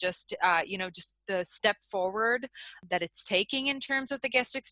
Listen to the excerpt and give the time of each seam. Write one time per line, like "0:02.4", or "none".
0:02.7